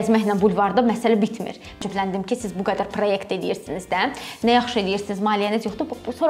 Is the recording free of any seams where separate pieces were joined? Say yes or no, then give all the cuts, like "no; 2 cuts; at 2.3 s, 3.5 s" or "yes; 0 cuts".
no; 1 cut; at 1.8 s